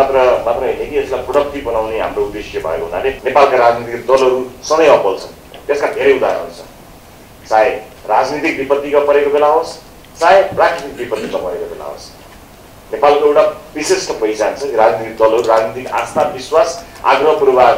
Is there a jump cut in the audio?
yes; 1 cut; at 3.2 s

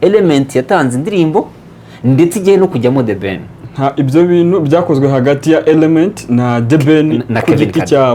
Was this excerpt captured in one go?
yes; 0 cuts

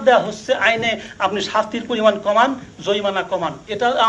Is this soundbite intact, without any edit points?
yes; 0 cuts

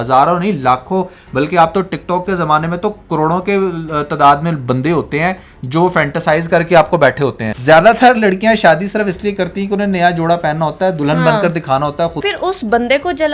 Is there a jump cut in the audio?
yes; 2 cuts; at 7.5 s, 12.2 s

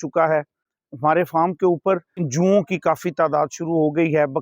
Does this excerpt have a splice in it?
yes; 1 cut; at 2.2 s

